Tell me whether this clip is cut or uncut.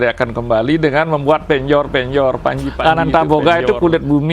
cut